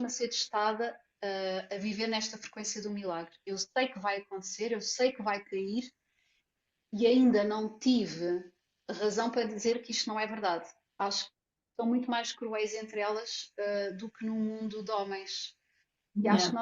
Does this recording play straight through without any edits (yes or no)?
no